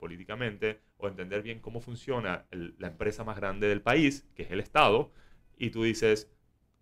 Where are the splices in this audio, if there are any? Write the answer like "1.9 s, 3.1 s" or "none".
none